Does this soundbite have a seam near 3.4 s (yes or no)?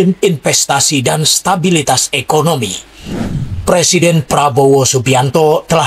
yes